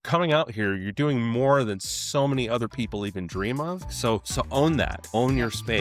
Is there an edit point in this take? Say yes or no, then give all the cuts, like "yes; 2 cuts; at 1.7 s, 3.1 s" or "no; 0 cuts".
yes; 2 cuts; at 3.9 s, 5.0 s